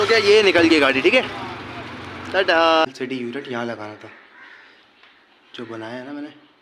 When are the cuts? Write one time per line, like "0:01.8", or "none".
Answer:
0:02.8